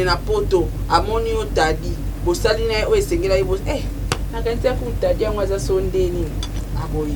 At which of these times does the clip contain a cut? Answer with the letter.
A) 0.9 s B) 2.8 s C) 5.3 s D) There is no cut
D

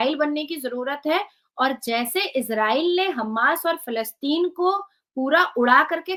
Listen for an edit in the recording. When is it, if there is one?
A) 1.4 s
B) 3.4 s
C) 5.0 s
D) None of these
D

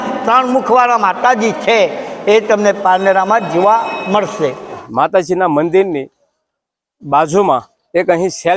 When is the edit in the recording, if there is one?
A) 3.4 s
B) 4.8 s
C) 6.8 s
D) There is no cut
B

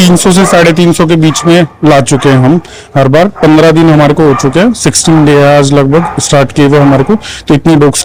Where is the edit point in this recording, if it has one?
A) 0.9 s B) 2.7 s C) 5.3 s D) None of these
D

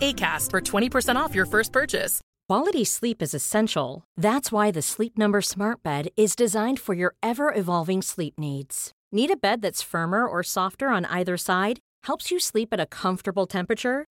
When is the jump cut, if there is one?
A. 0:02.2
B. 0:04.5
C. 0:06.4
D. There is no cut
A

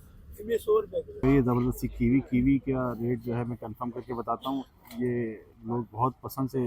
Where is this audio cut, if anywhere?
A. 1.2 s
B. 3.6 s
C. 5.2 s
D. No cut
A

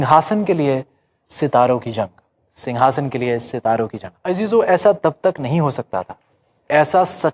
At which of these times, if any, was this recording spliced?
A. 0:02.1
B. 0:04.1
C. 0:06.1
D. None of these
B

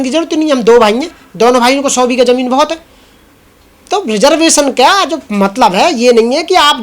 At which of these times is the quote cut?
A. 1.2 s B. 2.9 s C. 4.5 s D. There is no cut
D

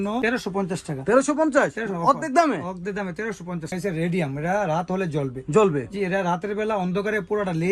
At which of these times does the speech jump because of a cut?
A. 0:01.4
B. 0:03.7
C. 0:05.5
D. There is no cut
B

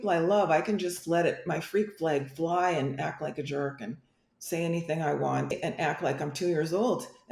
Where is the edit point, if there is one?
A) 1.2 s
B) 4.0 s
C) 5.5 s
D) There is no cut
C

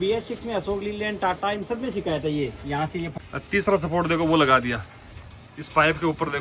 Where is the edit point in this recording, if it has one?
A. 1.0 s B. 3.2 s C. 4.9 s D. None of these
B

